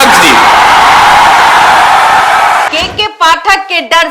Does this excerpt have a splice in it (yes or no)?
yes